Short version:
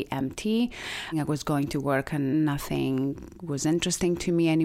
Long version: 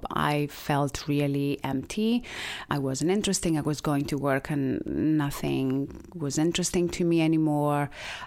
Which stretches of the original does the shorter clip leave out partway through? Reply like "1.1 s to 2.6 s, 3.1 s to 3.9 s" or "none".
2.7 s to 3.5 s, 4.7 s to 5.1 s